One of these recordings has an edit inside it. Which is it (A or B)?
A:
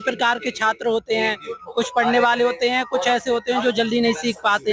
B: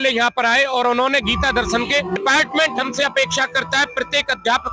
B